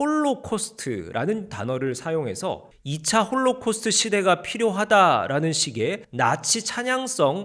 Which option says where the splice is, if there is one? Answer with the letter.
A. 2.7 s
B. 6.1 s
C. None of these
A